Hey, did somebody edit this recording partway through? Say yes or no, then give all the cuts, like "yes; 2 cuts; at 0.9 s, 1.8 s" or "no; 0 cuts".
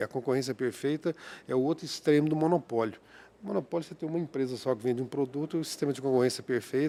no; 0 cuts